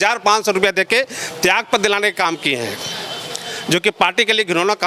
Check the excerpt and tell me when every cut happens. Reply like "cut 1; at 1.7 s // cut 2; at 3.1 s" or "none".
none